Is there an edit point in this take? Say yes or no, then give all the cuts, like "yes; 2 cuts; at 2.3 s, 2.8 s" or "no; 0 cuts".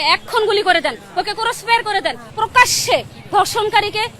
yes; 1 cut; at 2.2 s